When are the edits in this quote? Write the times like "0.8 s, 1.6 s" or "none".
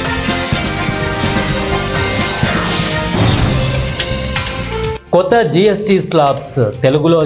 5.0 s